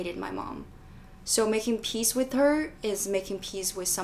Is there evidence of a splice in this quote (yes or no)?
no